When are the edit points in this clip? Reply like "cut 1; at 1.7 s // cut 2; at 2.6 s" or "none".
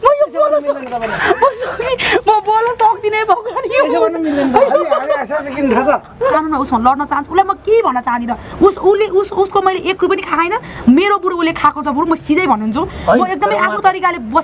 cut 1; at 6.3 s